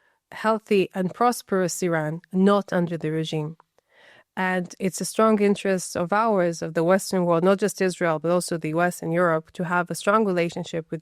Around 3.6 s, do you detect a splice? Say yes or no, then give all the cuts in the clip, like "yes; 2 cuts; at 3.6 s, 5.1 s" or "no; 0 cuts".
no; 0 cuts